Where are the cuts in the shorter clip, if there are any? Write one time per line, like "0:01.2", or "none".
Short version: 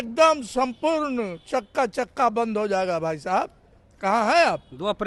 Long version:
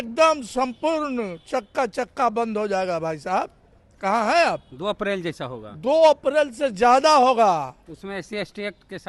none